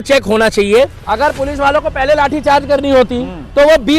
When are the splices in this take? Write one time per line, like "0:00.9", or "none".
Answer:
0:01.0